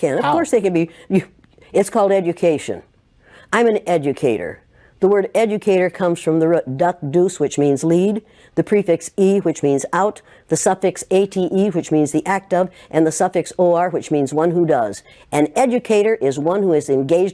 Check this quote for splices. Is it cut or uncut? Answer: uncut